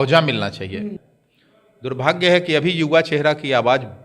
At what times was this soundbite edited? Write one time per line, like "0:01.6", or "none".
0:00.9